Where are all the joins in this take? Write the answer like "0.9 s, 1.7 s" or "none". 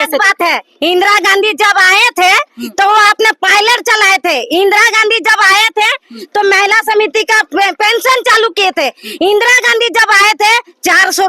none